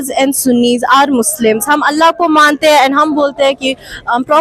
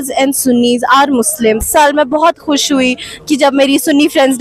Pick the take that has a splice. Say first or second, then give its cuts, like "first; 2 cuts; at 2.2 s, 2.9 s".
second; 1 cut; at 1.7 s